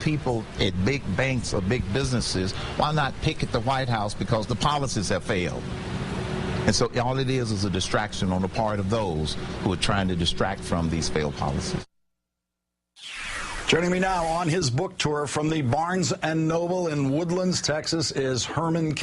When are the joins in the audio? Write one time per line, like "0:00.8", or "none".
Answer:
0:01.0